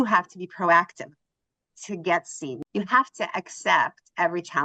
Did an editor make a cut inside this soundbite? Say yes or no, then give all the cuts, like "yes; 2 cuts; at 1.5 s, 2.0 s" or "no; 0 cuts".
yes; 1 cut; at 2.5 s